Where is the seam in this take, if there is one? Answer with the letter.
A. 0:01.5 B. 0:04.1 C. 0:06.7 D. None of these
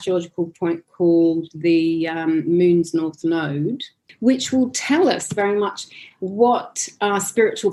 D